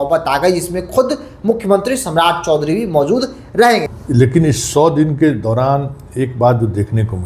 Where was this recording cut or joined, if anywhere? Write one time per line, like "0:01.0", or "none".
0:03.9